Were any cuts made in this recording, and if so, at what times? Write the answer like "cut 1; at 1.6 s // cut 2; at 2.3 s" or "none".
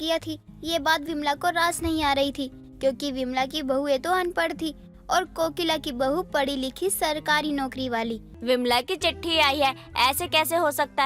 cut 1; at 8.3 s